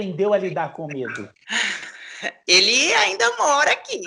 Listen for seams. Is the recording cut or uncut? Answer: cut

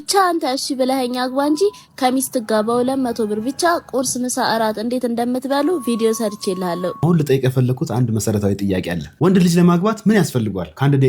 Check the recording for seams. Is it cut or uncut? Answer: uncut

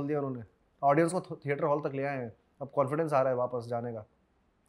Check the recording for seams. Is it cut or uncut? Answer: uncut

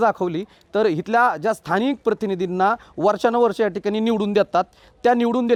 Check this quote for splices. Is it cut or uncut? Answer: uncut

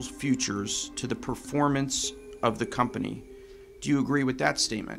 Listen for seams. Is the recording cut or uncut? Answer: uncut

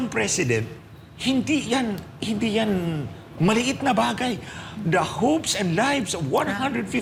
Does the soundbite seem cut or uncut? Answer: uncut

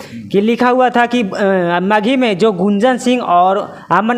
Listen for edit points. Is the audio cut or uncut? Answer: uncut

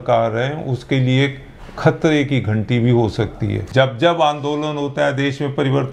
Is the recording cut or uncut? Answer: cut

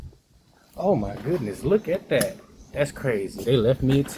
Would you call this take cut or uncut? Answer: uncut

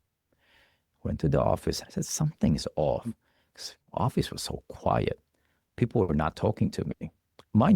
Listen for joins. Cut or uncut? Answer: cut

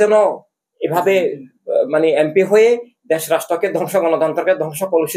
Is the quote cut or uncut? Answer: uncut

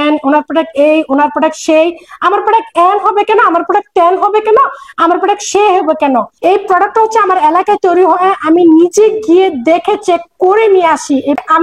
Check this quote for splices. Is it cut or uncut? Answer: uncut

